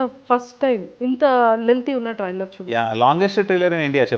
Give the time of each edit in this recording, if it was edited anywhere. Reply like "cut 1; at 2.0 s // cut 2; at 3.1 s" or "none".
cut 1; at 0.9 s